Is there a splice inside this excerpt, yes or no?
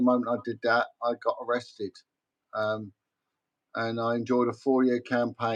no